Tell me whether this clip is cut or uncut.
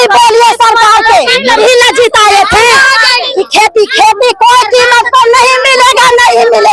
cut